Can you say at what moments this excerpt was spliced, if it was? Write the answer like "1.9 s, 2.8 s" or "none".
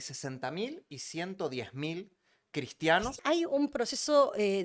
3.2 s